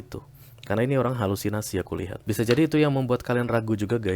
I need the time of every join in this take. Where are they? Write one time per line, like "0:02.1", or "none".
0:02.1